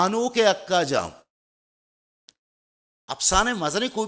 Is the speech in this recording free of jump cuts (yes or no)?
yes